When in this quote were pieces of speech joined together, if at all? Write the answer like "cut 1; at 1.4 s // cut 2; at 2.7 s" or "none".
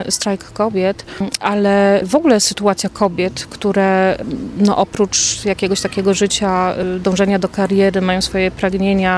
cut 1; at 2.0 s // cut 2; at 4.2 s // cut 3; at 6.8 s